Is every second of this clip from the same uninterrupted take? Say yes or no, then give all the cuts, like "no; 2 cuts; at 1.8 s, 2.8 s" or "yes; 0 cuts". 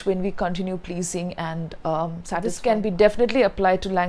no; 1 cut; at 2.6 s